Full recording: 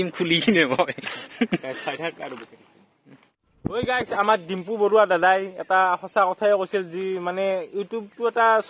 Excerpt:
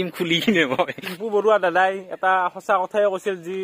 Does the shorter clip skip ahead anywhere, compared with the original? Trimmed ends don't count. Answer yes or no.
yes